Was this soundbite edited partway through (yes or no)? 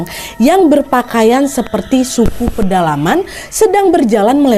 no